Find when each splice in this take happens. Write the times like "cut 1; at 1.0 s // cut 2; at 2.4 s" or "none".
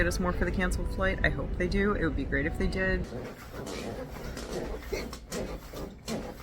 cut 1; at 3.1 s